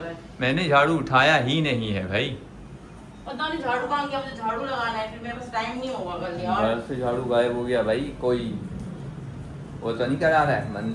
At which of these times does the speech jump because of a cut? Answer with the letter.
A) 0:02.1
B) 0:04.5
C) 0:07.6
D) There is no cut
D